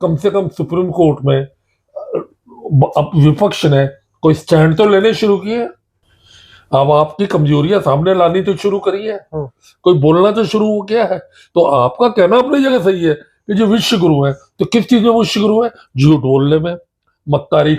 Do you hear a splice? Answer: no; 0 cuts

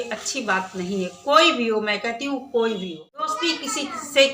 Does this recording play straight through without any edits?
no; 1 cut; at 3.4 s

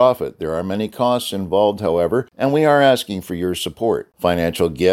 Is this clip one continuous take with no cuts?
no; 1 cut; at 2.3 s

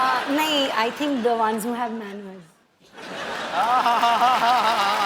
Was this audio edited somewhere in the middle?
no; 0 cuts

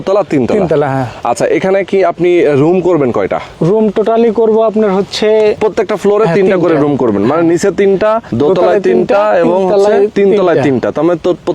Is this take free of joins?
no; 4 cuts; at 3.5 s, 5.6 s, 8.3 s, 10.1 s

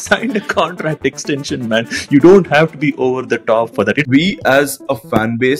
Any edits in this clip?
yes; 1 cut; at 4.0 s

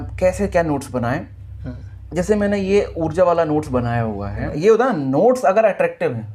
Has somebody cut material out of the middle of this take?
yes; 1 cut; at 4.5 s

